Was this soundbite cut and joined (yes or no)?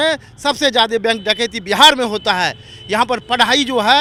no